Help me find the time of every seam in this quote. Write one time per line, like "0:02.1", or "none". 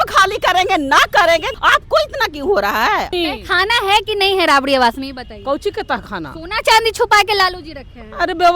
0:01.5
0:03.1

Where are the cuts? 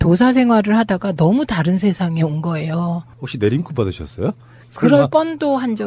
none

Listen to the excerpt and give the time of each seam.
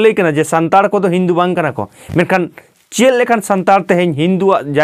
none

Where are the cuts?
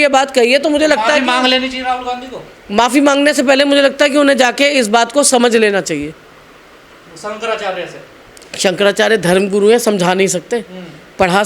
none

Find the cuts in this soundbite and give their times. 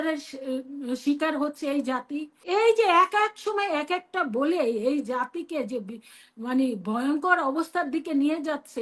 0:02.3

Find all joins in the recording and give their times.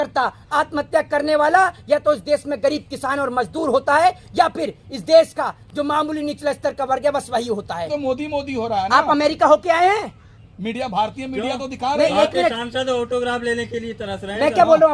0:07.9

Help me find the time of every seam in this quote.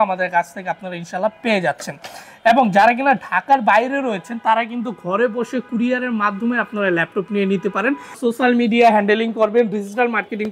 0:08.1

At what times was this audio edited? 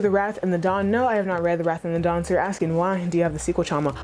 none

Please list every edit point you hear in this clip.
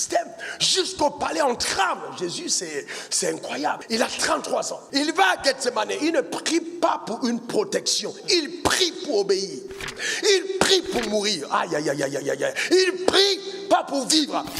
0:03.8
0:04.8

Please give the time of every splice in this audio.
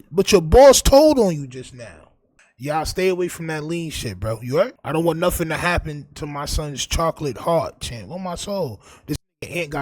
0:04.8

